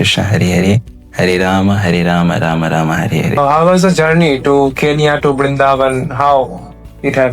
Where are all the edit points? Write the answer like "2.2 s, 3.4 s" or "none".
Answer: 3.4 s